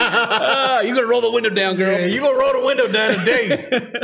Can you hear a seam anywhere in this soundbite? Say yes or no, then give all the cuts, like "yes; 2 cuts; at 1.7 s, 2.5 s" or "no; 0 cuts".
no; 0 cuts